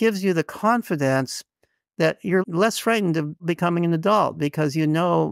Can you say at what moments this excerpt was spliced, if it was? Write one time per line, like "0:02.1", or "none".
0:02.4
0:03.4